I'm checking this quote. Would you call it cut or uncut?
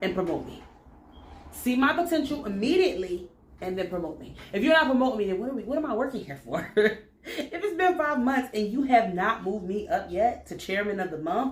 uncut